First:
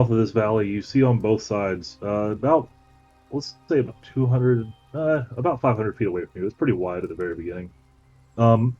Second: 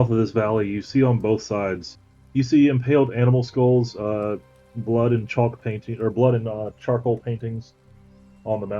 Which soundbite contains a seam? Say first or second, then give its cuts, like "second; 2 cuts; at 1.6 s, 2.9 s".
second; 1 cut; at 1.9 s